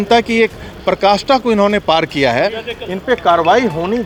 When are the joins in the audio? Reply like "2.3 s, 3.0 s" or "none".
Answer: none